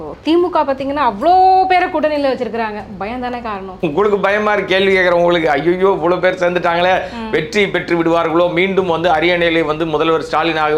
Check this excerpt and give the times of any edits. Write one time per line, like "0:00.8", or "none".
0:03.7